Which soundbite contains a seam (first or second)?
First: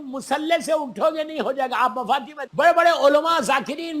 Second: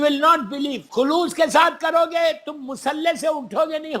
first